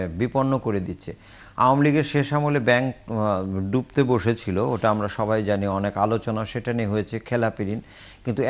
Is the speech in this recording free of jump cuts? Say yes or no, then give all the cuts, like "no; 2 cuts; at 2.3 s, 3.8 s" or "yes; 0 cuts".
yes; 0 cuts